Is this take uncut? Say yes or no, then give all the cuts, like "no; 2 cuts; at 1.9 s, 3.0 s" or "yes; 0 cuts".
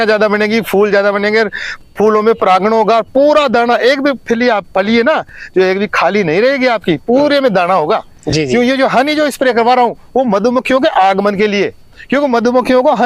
yes; 0 cuts